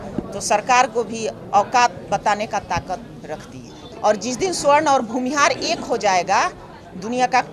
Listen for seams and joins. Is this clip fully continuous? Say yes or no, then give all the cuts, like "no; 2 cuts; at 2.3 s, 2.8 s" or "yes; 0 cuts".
no; 1 cut; at 3.8 s